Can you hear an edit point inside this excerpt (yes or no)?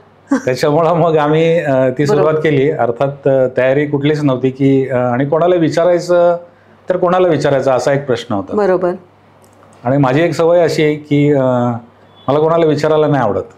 no